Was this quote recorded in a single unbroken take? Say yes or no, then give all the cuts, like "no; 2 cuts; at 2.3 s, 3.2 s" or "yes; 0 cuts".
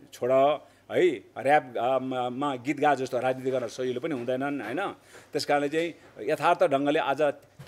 yes; 0 cuts